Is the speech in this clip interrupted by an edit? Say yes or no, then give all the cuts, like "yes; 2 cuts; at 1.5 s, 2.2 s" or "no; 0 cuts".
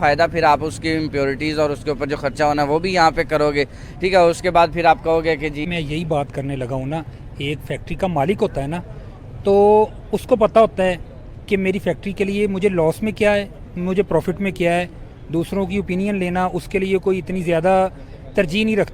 yes; 1 cut; at 5.6 s